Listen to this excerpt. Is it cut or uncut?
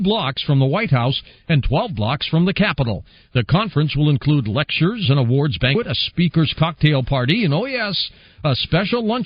cut